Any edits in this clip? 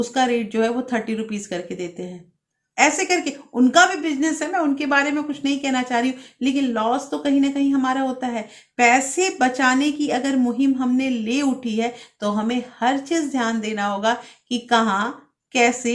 no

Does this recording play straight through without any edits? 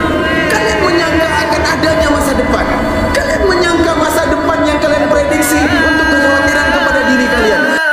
yes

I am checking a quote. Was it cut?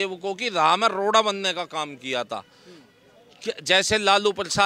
no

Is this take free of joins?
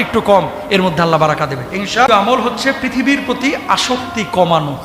no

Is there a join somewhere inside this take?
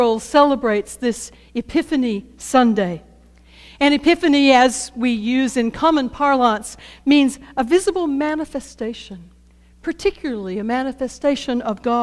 yes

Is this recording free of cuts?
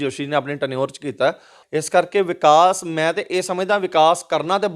no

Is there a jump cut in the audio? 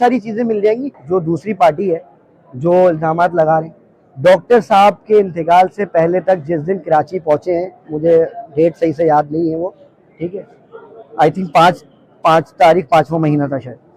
yes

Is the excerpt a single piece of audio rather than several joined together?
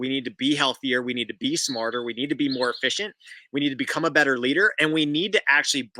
yes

